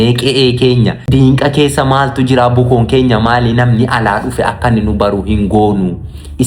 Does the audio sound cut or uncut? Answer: cut